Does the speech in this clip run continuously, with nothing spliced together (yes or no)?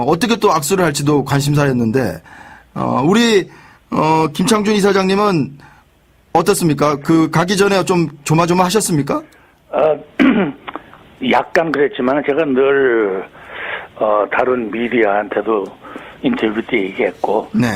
no